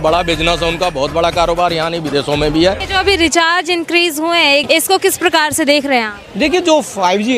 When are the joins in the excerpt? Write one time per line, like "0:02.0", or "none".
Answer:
0:02.8
0:04.6